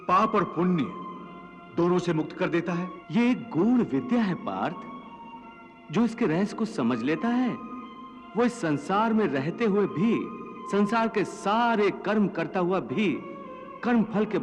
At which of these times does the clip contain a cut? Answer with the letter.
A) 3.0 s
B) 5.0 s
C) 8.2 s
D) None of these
A